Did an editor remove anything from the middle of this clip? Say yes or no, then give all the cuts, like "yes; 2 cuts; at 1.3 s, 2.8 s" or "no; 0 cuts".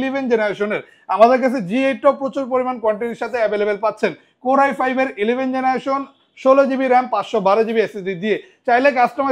no; 0 cuts